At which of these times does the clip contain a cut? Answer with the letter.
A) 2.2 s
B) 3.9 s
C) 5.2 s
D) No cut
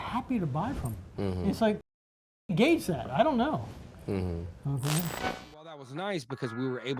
C